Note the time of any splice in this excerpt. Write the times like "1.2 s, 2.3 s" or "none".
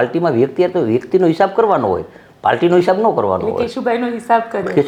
none